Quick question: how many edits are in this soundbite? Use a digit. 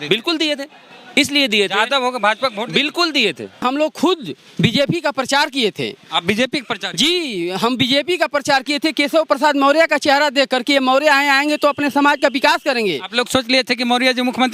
1